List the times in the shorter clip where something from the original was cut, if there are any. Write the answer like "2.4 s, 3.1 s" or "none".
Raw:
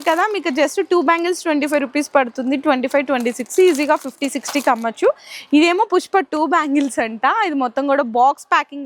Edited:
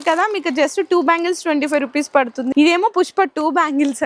2.5 s